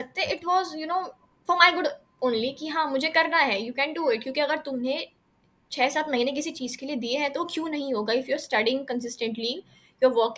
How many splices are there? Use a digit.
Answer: 0